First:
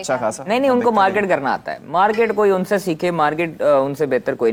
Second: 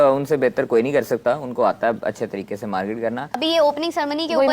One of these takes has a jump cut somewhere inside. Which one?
second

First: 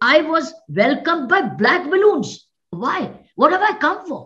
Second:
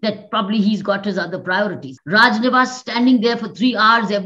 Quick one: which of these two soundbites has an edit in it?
second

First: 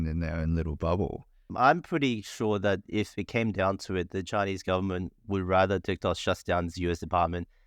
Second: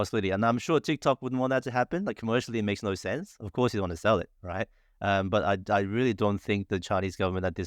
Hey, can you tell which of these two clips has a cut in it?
first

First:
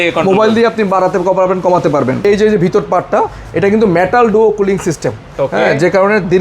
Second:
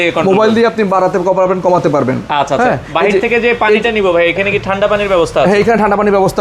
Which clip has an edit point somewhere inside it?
first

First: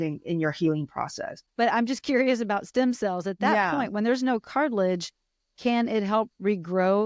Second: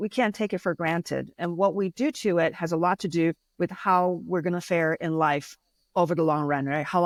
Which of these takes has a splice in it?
first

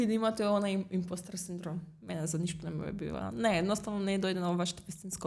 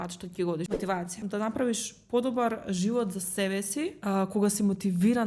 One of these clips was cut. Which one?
second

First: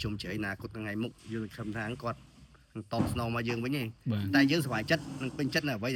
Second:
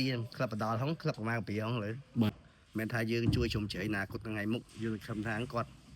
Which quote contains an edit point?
second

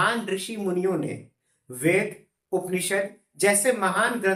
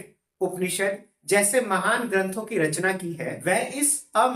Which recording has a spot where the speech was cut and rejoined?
second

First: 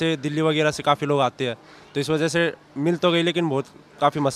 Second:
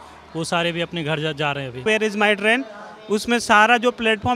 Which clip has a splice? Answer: second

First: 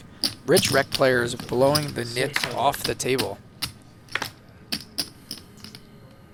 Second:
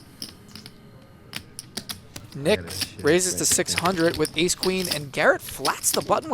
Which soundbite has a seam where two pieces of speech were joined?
second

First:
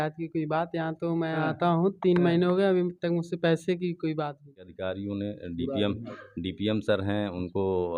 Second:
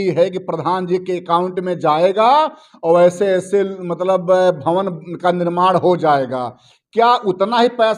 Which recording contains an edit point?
first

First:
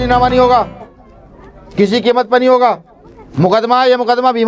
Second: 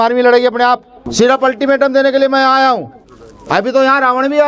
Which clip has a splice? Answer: second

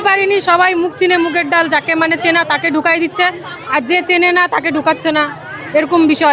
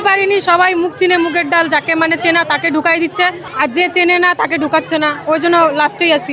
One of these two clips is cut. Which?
second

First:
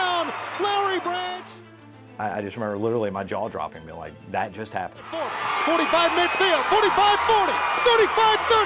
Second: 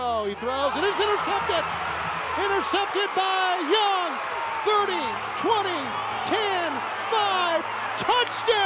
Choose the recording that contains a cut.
first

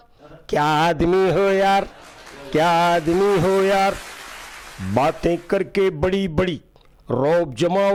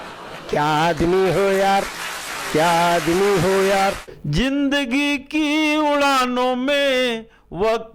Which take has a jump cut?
second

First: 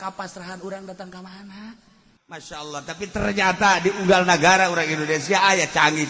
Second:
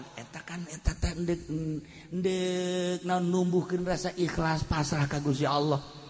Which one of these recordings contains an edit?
first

